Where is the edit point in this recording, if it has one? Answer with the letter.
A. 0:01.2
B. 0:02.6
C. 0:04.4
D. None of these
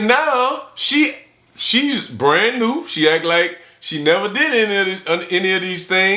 D